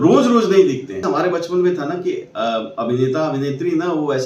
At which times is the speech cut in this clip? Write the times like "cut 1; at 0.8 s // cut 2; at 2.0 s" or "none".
cut 1; at 1.0 s